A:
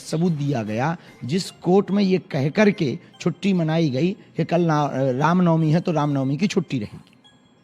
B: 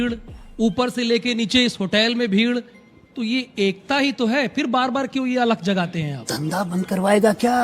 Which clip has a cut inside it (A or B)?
B